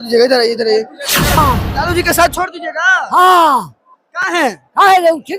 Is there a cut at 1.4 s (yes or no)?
yes